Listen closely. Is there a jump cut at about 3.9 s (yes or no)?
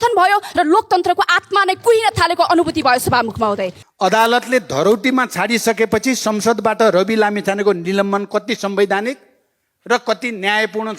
yes